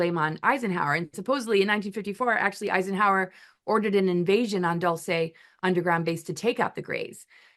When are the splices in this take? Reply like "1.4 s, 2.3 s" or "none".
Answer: none